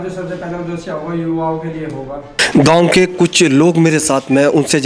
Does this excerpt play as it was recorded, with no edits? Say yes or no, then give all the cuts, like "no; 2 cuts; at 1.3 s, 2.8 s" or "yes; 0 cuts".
yes; 0 cuts